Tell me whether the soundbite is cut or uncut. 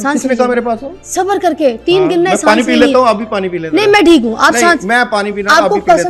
uncut